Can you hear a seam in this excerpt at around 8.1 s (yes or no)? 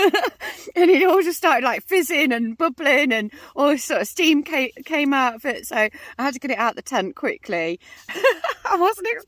yes